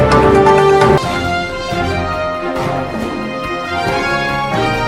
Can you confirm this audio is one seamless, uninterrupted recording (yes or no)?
yes